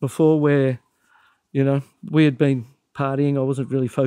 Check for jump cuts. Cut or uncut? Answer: uncut